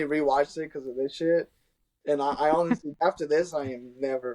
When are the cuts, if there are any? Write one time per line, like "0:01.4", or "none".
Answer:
0:03.0